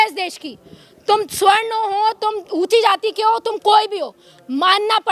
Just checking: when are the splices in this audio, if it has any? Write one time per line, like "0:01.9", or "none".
none